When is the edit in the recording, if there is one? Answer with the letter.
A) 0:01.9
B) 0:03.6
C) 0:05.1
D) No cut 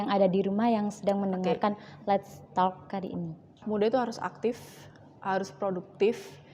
B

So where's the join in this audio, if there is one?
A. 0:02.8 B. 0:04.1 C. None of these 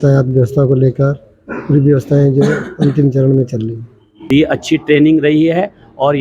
B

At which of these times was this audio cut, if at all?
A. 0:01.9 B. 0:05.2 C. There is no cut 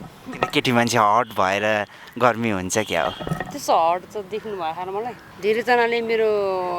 B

